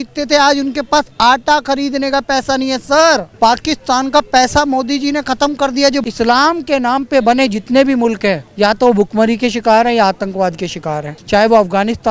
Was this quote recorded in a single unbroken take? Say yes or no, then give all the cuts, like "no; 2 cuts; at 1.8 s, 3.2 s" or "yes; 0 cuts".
no; 4 cuts; at 3.3 s, 6.0 s, 8.5 s, 11.1 s